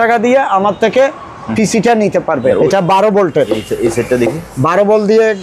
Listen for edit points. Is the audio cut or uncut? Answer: cut